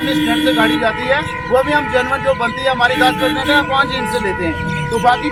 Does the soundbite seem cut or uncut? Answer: uncut